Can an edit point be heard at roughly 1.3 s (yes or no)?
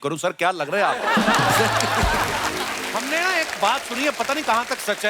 no